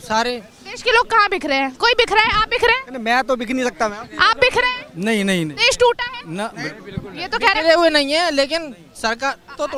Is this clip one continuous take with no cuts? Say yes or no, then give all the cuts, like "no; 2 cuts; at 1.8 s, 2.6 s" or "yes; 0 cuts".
yes; 0 cuts